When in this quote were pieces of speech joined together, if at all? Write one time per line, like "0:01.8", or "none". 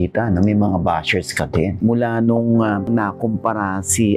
0:02.8